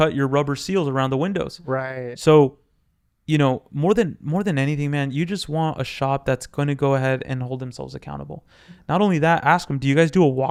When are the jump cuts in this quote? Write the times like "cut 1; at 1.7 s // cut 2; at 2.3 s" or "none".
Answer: none